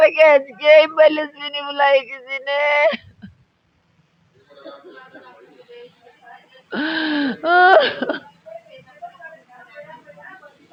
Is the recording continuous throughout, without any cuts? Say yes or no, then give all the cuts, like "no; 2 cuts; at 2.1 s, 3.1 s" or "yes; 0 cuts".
yes; 0 cuts